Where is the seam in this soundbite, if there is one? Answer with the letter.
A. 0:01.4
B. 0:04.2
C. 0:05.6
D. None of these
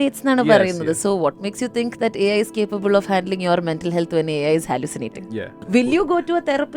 C